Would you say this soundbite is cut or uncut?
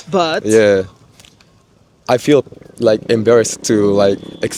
uncut